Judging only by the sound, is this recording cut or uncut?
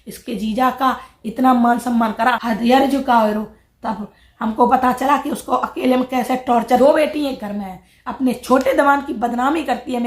cut